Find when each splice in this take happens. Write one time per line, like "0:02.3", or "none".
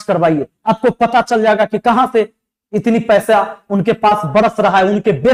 none